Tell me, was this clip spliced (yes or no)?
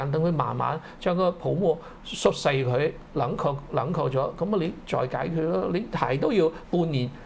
no